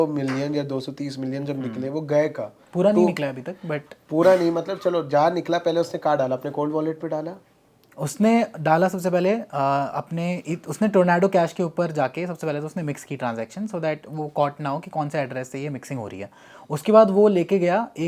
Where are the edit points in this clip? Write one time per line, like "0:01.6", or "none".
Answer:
none